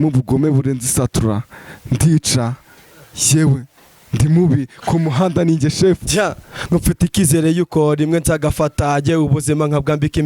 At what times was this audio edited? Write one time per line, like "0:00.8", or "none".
0:06.0